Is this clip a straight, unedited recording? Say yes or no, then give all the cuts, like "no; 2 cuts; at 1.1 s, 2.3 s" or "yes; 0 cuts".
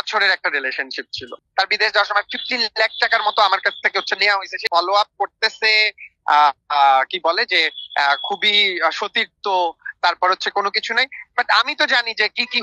no; 2 cuts; at 1.4 s, 4.6 s